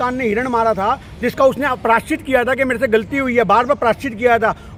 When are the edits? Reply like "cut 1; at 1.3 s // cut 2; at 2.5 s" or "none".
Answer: none